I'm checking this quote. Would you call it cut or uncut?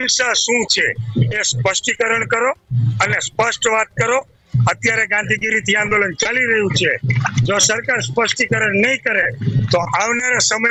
uncut